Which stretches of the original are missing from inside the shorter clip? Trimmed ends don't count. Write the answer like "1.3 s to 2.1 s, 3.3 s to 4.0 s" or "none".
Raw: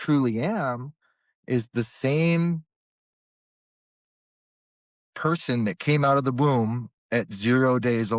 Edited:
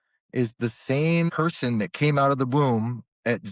2.4 s to 5.2 s

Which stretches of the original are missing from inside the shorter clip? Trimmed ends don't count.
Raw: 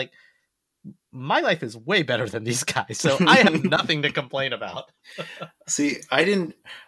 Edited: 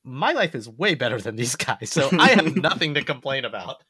none

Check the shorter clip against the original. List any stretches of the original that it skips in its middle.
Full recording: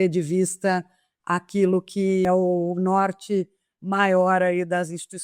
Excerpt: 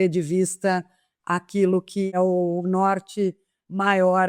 2.1 s to 2.2 s

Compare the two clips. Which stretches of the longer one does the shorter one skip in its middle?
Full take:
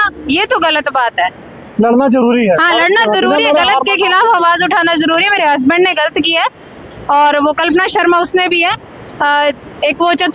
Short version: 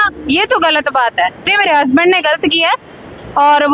1.5 s to 5.3 s

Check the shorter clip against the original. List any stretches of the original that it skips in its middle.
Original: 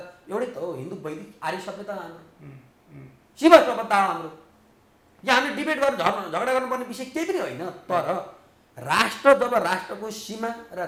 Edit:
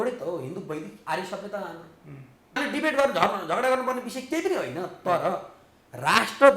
2.9 s to 5.4 s

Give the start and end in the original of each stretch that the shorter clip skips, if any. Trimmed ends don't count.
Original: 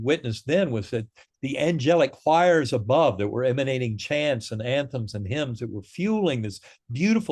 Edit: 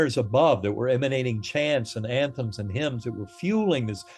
none

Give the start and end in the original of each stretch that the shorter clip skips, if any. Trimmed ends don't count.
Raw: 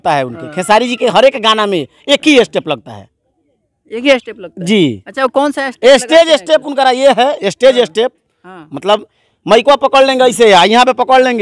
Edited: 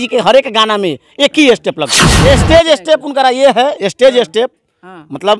3.0 s to 5.7 s

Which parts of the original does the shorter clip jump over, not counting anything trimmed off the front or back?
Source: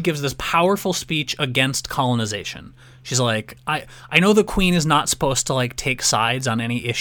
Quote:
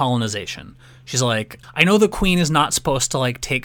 3.6 s to 3.9 s

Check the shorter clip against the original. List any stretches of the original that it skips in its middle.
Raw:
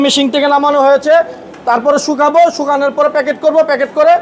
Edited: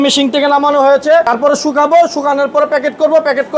1.3 s to 1.7 s

